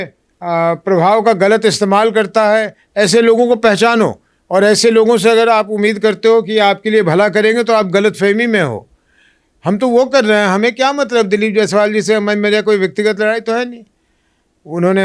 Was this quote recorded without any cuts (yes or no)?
yes